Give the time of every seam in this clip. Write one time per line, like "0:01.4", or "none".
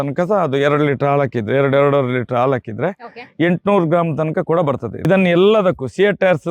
0:04.9